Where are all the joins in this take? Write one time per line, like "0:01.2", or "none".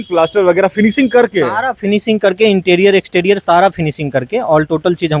none